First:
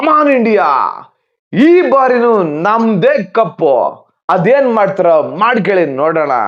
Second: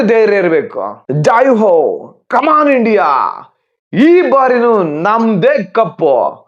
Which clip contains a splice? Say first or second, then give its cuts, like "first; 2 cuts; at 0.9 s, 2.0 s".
second; 1 cut; at 1.0 s